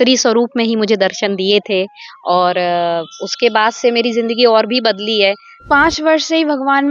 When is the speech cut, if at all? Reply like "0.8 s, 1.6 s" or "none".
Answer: 5.5 s